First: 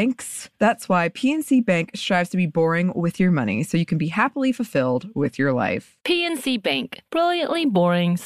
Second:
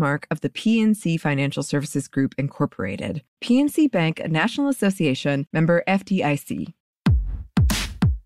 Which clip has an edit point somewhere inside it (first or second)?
second